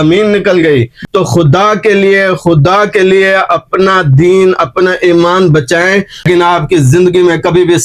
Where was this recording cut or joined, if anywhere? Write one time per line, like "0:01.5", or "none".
0:01.0
0:06.2